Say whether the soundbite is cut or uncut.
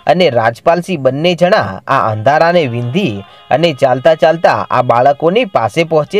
uncut